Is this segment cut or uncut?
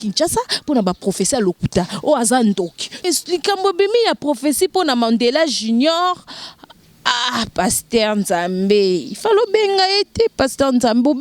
cut